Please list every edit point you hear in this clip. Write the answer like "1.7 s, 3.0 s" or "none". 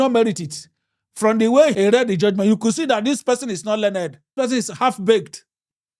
4.3 s